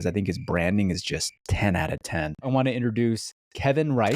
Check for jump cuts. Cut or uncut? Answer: cut